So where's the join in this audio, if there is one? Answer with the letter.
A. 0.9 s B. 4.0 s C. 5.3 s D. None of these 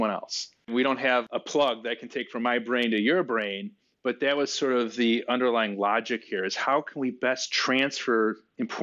A